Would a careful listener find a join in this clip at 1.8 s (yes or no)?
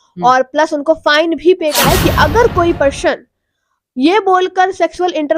yes